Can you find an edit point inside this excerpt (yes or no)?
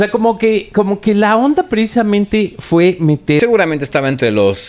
yes